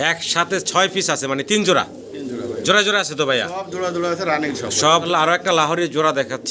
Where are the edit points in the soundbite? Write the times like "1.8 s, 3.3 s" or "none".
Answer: 5.0 s